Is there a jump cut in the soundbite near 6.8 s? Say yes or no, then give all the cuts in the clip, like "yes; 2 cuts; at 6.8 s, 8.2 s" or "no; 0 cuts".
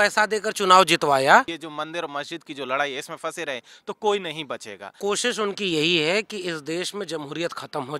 no; 2 cuts; at 1.6 s, 4.9 s